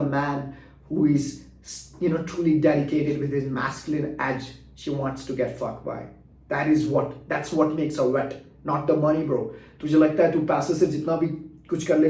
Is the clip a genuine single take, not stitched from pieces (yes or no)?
yes